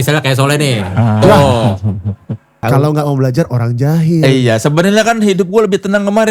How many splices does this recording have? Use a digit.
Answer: 1